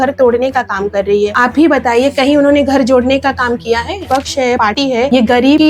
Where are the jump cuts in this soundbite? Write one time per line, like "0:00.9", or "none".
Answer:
0:04.1

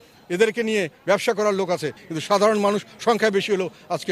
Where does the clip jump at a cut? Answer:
0:02.0

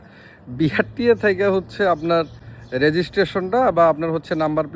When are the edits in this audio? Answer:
none

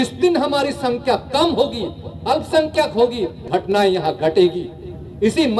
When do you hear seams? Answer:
0:03.4

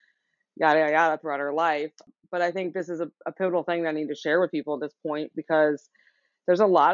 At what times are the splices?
0:02.1

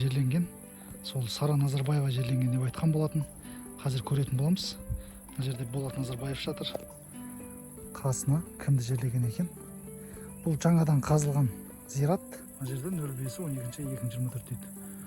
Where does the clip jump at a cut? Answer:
0:12.4

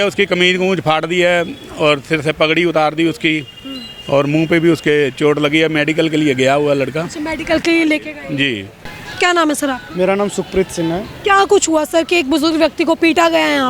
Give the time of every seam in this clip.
none

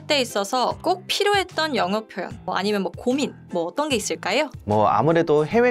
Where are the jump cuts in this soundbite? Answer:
0:00.8
0:02.5
0:04.6

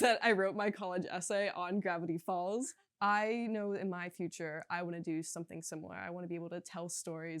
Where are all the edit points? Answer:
0:02.7

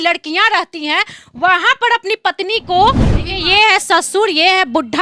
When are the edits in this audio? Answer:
0:03.2

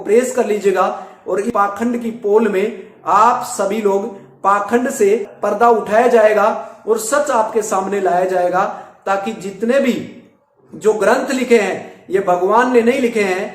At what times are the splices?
0:01.5
0:05.3

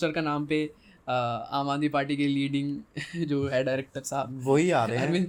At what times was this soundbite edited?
none

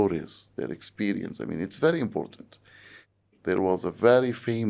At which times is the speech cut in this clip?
0:03.2

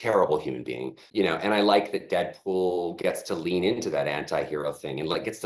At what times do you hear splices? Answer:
0:01.0

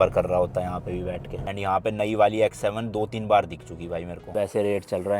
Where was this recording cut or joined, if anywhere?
0:01.5
0:04.3

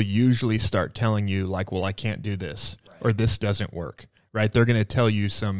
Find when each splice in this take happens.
none

